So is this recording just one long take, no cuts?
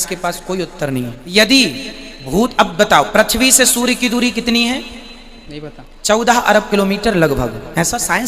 no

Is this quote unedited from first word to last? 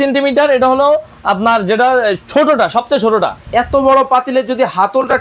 no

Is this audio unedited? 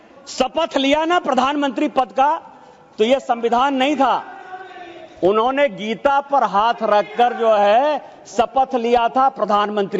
yes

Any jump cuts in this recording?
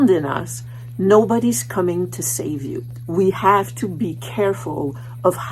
yes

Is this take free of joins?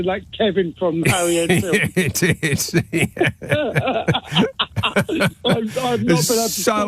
yes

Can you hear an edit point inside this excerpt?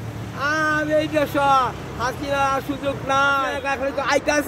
yes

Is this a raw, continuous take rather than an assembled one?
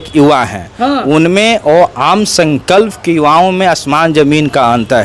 yes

